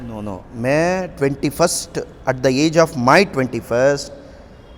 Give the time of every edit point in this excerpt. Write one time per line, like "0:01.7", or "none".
none